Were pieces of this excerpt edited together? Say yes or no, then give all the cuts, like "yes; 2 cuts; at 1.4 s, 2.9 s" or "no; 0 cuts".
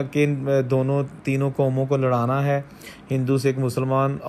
no; 0 cuts